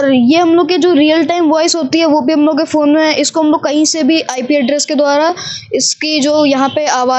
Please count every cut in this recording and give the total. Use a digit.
0